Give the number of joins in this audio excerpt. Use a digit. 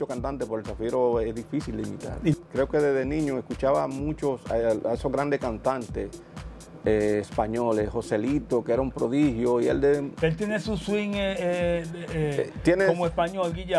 1